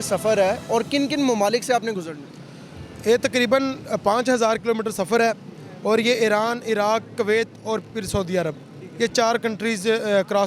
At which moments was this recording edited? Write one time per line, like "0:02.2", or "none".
none